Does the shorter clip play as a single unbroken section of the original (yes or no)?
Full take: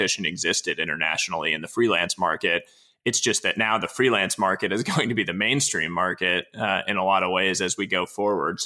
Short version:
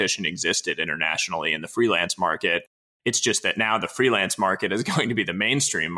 yes